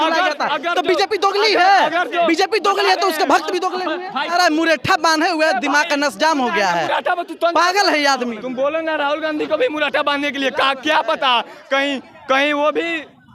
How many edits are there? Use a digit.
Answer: 2